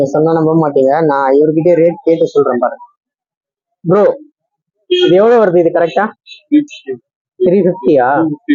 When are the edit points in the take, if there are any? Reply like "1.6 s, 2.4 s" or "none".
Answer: none